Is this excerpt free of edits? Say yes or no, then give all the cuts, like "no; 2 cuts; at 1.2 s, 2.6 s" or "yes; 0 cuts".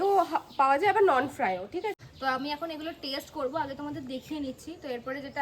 no; 1 cut; at 2.0 s